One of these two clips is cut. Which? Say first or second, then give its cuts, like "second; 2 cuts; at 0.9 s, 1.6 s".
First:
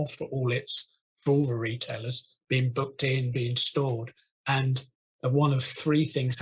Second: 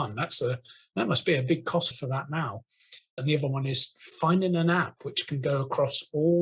second; 1 cut; at 3.1 s